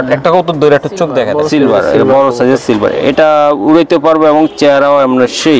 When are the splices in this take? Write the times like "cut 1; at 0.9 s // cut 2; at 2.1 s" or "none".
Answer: cut 1; at 1.3 s